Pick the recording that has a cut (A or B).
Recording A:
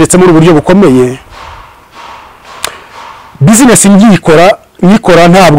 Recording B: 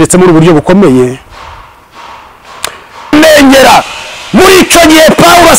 B